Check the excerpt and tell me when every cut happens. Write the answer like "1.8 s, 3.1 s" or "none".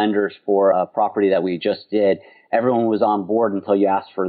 none